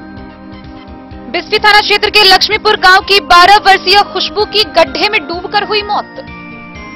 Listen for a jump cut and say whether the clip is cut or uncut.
cut